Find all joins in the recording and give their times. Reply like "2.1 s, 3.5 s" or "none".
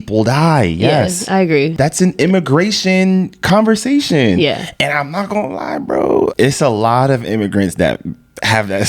1.7 s, 6.3 s